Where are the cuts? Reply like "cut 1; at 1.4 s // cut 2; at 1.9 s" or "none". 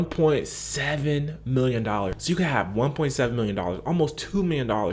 none